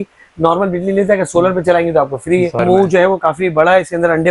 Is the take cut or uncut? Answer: cut